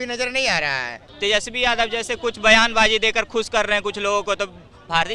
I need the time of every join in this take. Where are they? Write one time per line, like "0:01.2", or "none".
0:01.0